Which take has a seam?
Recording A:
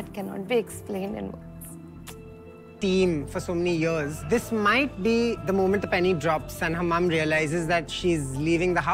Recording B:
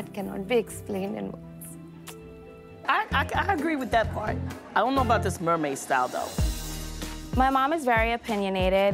B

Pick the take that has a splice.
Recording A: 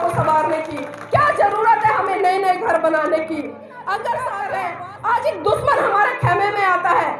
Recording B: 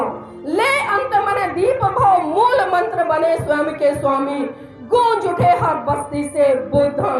A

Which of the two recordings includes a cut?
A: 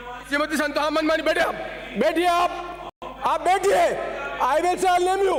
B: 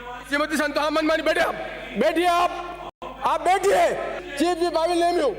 B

